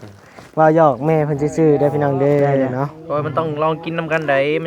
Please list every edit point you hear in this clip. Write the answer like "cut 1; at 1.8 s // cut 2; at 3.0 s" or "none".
cut 1; at 3.0 s